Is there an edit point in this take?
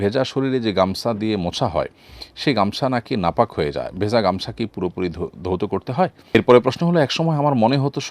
yes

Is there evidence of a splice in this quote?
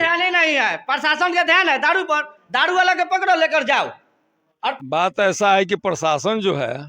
yes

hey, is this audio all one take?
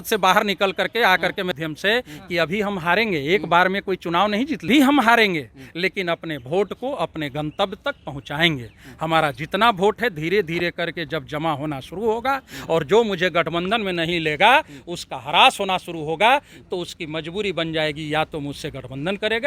no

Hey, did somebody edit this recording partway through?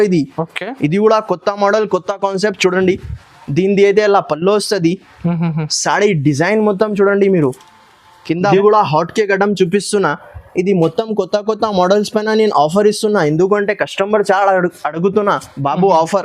yes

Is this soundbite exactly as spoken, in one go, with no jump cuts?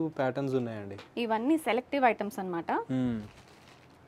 yes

